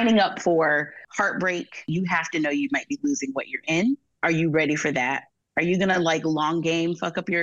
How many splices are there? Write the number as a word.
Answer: two